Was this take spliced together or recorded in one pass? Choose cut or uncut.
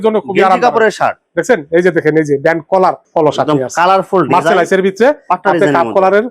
cut